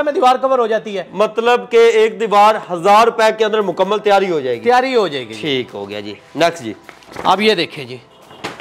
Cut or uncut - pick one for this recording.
uncut